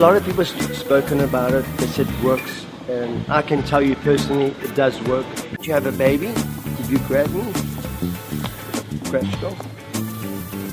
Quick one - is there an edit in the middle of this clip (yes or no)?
yes